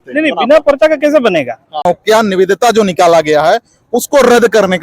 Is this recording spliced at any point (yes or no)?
yes